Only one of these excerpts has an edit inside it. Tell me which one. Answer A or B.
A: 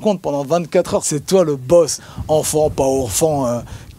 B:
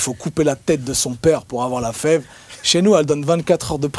A